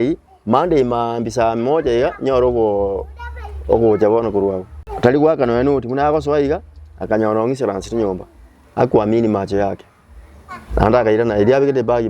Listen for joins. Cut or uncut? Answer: cut